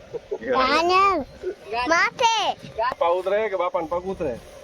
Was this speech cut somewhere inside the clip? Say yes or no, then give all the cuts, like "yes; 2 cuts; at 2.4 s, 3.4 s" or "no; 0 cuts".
yes; 1 cut; at 3.0 s